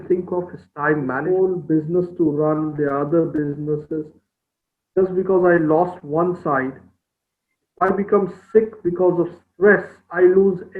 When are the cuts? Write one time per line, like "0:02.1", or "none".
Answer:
0:01.2